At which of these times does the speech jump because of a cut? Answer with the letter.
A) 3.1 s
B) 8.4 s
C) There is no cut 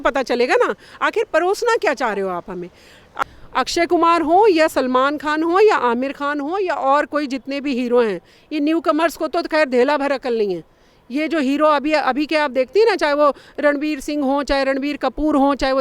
A